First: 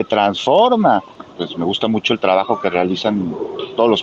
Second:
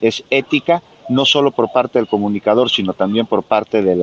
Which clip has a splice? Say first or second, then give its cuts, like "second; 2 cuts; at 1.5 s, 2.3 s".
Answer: first; 1 cut; at 1.2 s